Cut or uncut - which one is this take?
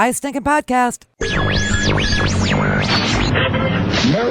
cut